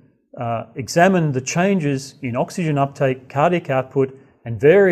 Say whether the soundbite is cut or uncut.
uncut